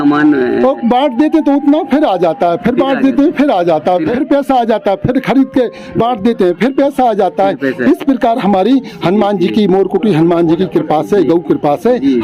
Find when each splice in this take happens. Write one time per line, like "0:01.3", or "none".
0:04.2